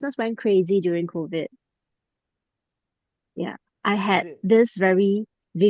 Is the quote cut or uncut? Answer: uncut